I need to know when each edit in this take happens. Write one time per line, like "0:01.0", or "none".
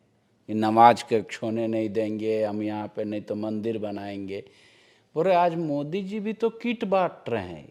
none